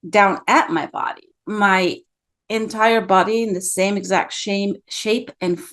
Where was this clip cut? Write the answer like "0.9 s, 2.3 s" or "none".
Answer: none